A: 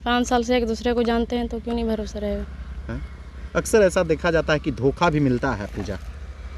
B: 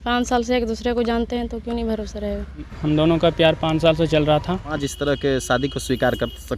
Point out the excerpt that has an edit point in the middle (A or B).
B